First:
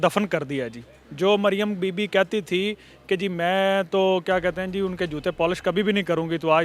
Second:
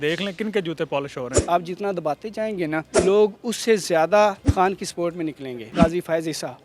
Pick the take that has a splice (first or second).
second